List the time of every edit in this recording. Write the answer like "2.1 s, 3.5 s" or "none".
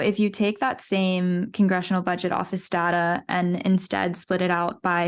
none